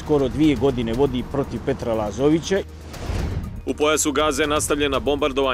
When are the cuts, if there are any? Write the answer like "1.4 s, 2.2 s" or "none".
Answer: 2.6 s